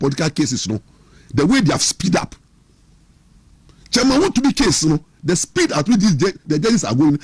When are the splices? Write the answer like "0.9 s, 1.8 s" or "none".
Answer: none